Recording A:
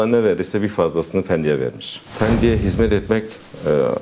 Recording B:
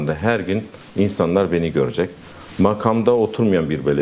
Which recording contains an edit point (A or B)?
A